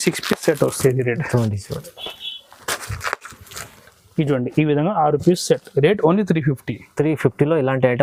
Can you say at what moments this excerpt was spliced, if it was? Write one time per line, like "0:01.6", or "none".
none